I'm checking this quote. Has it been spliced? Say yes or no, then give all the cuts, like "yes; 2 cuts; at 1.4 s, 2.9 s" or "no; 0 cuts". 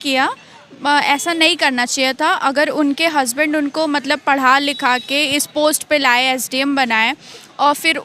no; 0 cuts